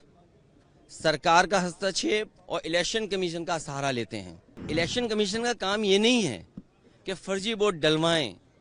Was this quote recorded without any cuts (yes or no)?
no